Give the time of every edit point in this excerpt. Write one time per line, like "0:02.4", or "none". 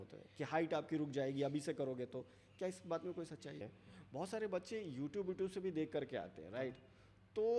0:03.8